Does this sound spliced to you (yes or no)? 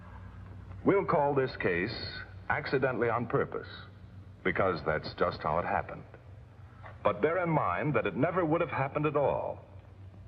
yes